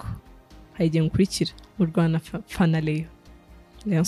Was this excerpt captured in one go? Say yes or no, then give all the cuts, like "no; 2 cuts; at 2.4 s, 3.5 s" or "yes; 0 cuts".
yes; 0 cuts